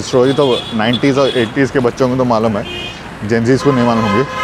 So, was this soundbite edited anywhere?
no; 0 cuts

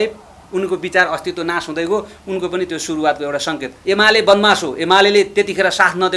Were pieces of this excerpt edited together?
yes; 1 cut; at 3.7 s

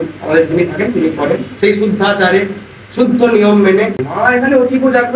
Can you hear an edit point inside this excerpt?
yes; 1 cut; at 4.1 s

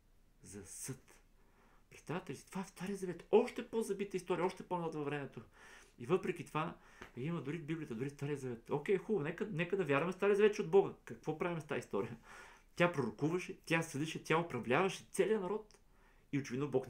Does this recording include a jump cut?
no; 0 cuts

